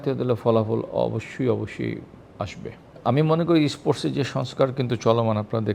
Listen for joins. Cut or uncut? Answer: uncut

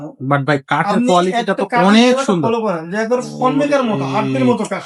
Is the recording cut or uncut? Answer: uncut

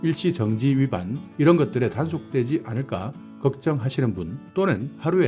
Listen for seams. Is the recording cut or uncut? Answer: uncut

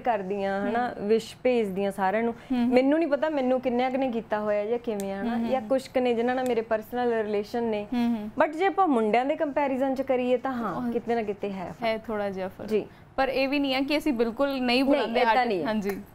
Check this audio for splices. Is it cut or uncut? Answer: uncut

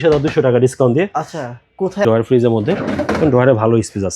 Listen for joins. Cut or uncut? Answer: cut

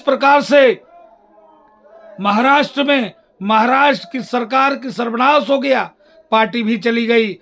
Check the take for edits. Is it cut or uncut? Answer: uncut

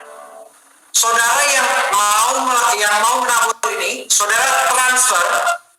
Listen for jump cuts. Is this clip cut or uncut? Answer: uncut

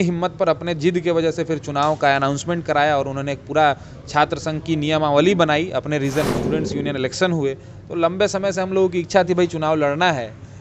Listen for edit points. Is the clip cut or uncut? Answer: cut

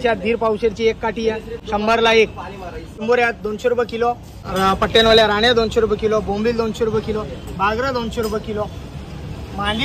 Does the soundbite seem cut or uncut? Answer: cut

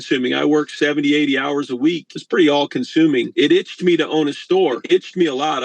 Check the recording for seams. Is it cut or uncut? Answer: cut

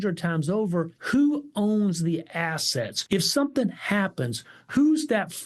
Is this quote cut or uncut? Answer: cut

